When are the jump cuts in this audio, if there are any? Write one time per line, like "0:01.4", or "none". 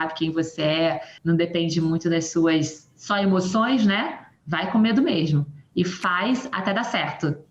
0:01.1